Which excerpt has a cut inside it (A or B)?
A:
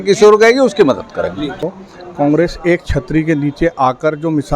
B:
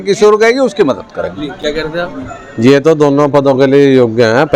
A